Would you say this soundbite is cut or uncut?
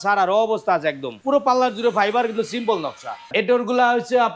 cut